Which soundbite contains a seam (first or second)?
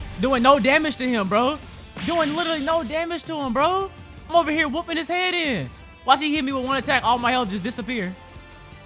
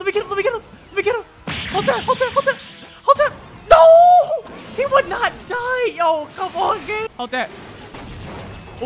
second